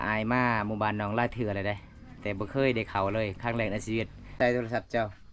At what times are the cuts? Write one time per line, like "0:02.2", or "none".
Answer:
0:04.4